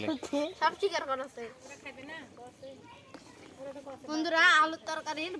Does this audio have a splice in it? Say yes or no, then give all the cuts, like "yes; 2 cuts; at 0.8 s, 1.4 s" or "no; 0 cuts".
yes; 1 cut; at 1.6 s